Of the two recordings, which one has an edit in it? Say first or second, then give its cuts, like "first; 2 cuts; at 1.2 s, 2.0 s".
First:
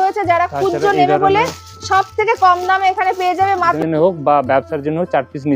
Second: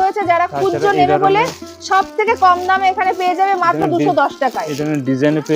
first; 1 cut; at 3.8 s